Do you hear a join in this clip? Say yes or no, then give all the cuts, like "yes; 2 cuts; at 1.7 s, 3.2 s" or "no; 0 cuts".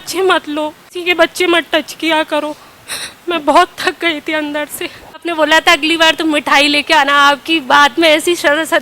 yes; 2 cuts; at 1.0 s, 5.2 s